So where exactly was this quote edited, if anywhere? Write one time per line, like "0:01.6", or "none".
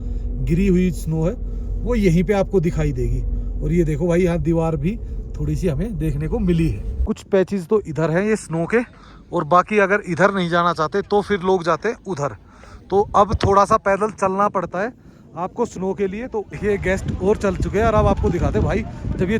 0:06.9
0:16.5